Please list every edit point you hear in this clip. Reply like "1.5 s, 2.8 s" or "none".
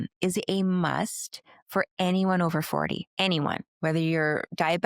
3.1 s, 3.7 s